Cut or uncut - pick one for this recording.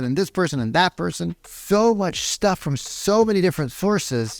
cut